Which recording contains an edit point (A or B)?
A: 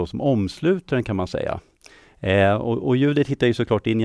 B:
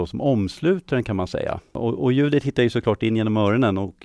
B